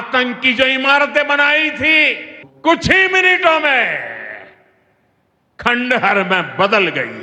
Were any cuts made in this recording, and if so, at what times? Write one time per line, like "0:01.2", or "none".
0:02.4